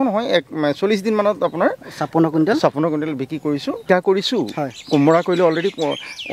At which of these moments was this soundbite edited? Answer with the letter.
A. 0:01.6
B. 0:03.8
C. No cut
B